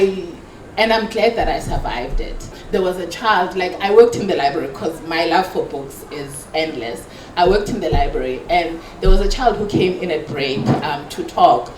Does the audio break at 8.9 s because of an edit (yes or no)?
no